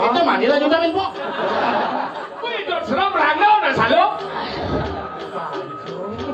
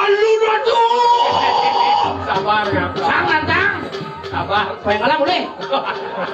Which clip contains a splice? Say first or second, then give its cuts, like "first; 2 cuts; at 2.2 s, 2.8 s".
first; 1 cut; at 2.5 s